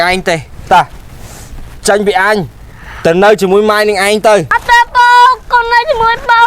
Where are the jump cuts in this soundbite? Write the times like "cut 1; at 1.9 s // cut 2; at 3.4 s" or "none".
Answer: cut 1; at 4.5 s